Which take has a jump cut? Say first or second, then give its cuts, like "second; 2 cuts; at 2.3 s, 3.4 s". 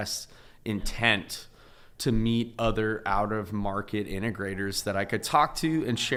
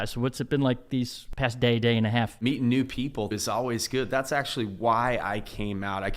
second; 3 cuts; at 1.2 s, 2.4 s, 3.3 s